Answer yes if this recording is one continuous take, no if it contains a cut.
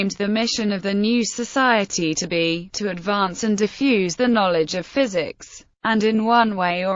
no